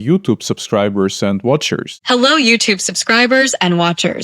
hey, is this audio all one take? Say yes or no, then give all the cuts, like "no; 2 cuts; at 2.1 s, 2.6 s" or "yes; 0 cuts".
no; 1 cut; at 1.9 s